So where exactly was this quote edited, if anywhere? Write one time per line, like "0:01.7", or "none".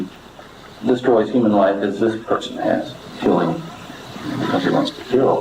0:03.1